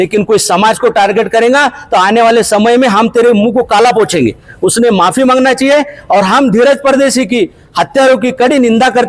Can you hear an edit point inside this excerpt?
no; 0 cuts

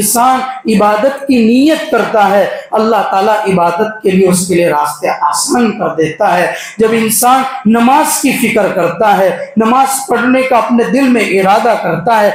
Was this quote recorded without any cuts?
yes; 0 cuts

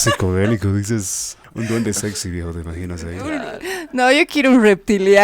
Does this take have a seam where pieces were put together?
yes; 1 cut; at 1.4 s

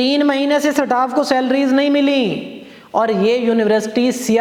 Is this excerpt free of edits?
yes; 0 cuts

